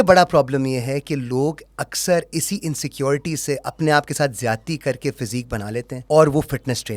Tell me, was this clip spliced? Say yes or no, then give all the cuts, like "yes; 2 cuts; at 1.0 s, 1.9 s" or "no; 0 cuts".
yes; 1 cut; at 6.0 s